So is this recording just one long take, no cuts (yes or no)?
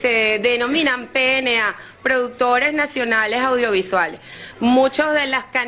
no